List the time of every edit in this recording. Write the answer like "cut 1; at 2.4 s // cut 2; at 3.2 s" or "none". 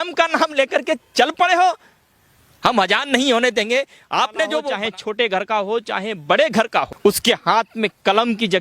cut 1; at 4.7 s // cut 2; at 6.9 s

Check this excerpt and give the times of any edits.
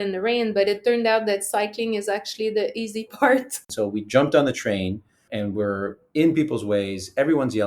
cut 1; at 3.5 s

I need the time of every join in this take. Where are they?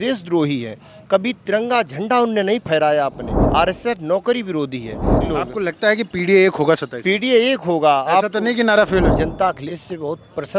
cut 1; at 3.3 s // cut 2; at 5.2 s // cut 3; at 9.1 s

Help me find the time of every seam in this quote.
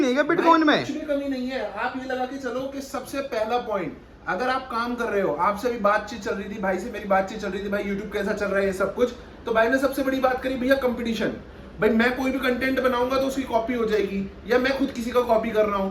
none

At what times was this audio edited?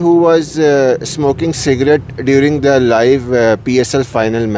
none

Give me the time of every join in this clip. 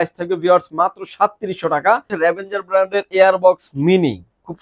cut 1; at 2.1 s

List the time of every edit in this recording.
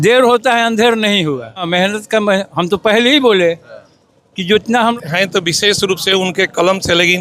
cut 1; at 1.7 s // cut 2; at 4.9 s

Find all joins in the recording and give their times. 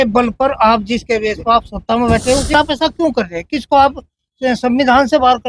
cut 1; at 2.5 s

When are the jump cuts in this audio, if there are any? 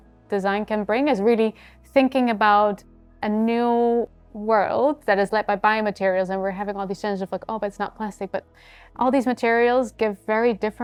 none

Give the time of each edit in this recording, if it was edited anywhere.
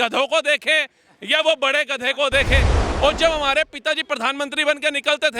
cut 1; at 2.8 s

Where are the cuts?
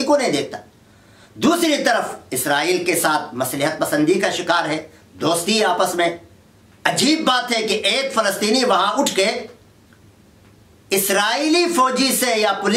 none

